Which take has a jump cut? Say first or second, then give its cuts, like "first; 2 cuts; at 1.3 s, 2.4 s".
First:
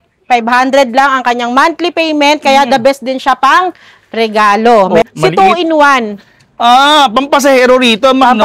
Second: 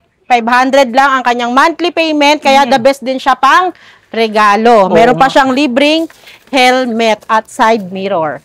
first; 1 cut; at 5.0 s